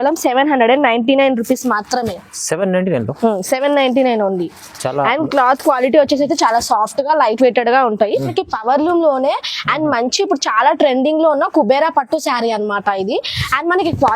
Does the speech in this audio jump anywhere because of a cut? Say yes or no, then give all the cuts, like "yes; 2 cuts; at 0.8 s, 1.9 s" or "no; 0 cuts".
yes; 1 cut; at 8.3 s